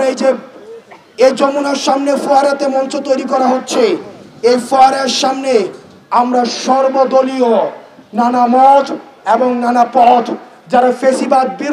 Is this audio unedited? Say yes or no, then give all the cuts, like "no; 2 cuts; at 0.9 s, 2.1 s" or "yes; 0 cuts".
yes; 0 cuts